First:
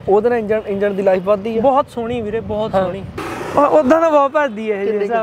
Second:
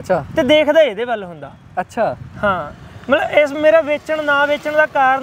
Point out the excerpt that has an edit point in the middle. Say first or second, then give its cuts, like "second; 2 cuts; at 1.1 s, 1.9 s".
first; 1 cut; at 3.1 s